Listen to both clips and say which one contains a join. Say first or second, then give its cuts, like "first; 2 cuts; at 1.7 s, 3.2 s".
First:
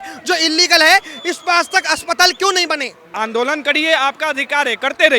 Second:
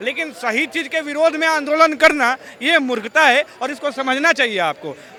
first; 1 cut; at 3.1 s